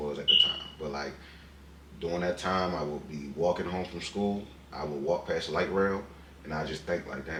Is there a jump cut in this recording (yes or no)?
no